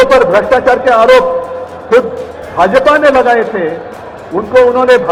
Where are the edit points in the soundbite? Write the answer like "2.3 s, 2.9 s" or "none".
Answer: none